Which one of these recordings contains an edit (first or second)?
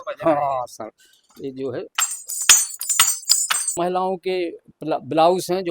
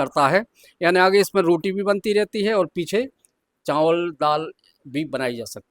first